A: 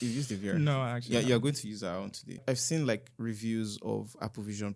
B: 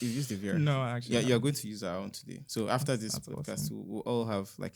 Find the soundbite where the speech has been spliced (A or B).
A